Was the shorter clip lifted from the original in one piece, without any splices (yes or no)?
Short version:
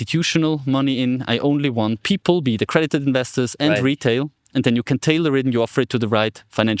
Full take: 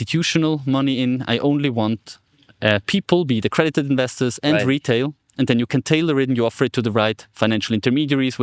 no